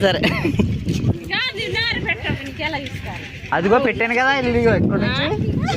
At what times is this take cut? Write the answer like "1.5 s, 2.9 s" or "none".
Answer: 1.2 s